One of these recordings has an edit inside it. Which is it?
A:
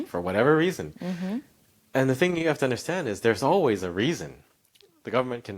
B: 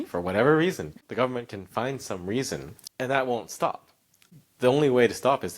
B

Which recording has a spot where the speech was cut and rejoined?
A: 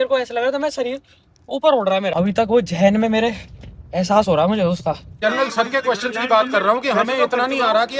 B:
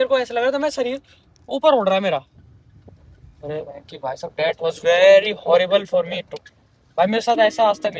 A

